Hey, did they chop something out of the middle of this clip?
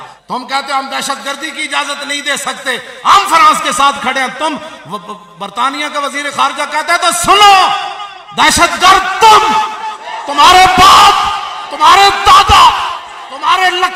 no; 0 cuts

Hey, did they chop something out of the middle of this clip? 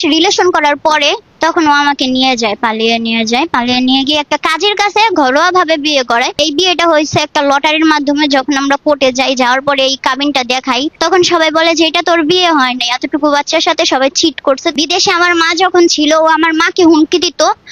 yes; 4 cuts; at 1.3 s, 6.4 s, 11.0 s, 14.7 s

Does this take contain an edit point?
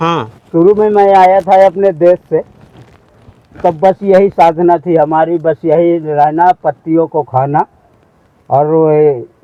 no; 0 cuts

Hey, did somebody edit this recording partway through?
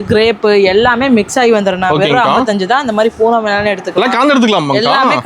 no; 0 cuts

